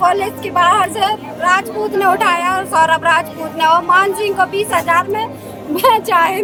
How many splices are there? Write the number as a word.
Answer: zero